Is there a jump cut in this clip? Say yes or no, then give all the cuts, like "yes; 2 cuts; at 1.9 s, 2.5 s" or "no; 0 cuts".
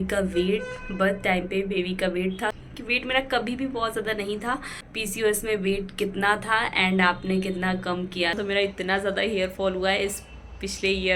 yes; 3 cuts; at 2.7 s, 4.8 s, 8.3 s